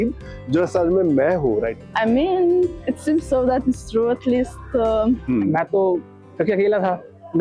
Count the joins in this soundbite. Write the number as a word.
two